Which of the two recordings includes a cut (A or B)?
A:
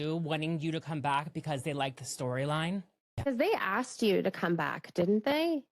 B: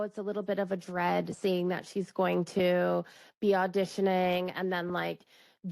A